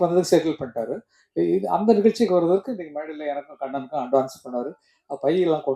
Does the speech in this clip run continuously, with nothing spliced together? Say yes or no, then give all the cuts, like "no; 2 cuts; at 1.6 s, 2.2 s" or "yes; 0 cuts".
yes; 0 cuts